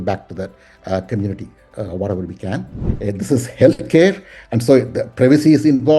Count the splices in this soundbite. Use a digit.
1